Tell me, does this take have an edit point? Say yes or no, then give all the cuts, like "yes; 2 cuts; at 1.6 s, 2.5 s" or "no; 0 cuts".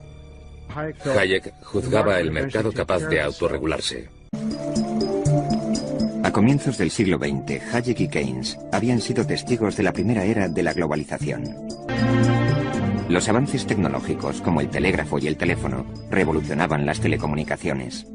yes; 1 cut; at 17.1 s